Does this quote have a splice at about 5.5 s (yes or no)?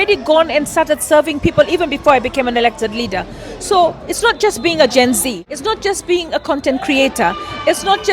yes